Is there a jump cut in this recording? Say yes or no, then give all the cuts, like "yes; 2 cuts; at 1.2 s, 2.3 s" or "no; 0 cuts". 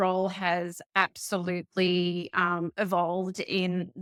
no; 0 cuts